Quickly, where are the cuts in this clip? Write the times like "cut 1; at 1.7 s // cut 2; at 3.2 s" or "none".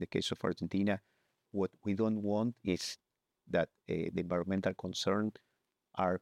cut 1; at 1.5 s